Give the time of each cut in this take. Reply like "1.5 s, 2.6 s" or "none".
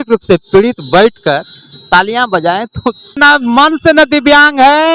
3.2 s

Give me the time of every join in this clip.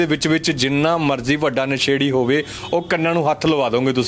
none

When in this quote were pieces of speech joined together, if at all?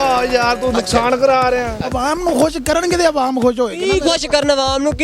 1.8 s

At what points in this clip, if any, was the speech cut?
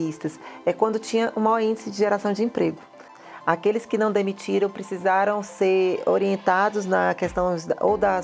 3.2 s

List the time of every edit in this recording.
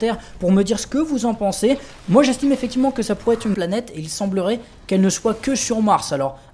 none

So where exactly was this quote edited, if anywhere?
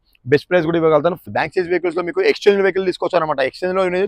1.2 s

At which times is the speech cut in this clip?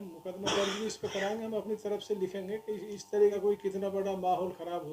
3.4 s

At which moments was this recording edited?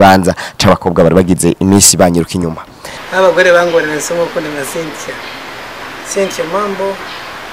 3.1 s

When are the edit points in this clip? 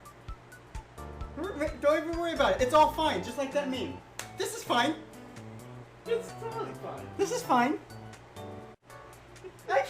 8.7 s

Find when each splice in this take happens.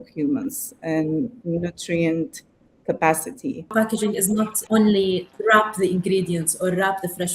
4.1 s, 5.3 s

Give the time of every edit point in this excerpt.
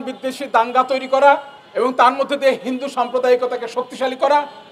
1.6 s

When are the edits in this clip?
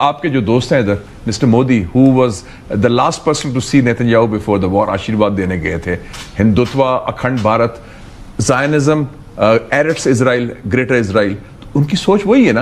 none

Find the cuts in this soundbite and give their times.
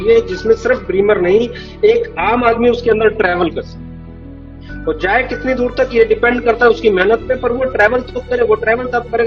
none

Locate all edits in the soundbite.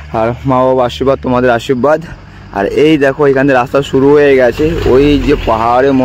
none

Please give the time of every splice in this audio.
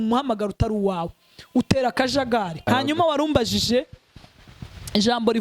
2.6 s

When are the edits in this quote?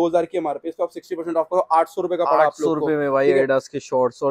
none

